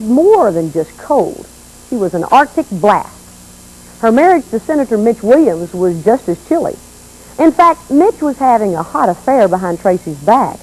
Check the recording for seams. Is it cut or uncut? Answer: uncut